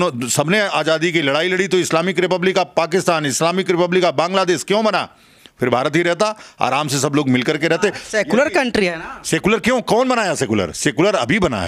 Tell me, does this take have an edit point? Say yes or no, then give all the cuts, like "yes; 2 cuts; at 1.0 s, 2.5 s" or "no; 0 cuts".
no; 0 cuts